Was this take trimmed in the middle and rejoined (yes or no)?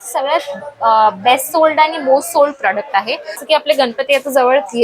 yes